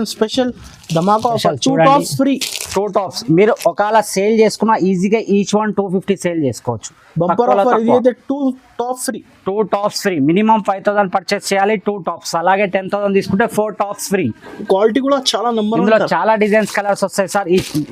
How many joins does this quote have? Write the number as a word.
zero